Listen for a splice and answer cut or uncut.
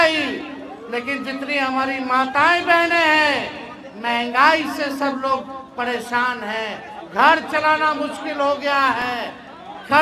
uncut